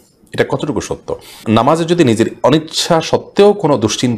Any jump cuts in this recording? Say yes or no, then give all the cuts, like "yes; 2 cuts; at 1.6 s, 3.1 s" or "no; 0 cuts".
yes; 1 cut; at 1.4 s